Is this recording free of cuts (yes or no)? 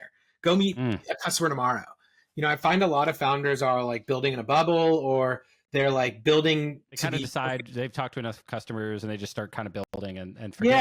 yes